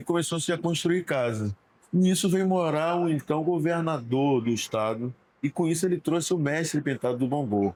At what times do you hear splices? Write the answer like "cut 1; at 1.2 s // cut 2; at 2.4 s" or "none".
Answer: none